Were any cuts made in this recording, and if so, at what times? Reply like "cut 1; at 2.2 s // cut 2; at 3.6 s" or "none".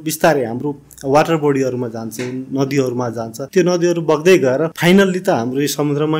cut 1; at 3.4 s // cut 2; at 4.7 s